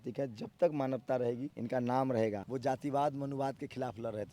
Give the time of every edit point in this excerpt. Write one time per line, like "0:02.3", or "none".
0:01.5
0:02.4